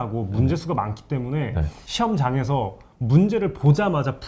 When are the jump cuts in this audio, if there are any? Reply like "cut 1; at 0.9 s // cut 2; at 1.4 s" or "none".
cut 1; at 1.8 s